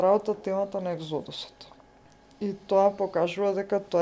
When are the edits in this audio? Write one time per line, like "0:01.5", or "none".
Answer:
none